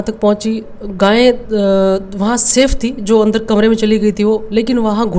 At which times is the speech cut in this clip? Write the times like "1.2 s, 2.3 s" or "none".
none